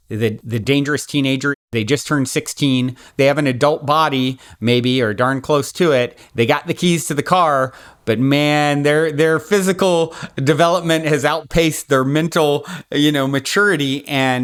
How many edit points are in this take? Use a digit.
0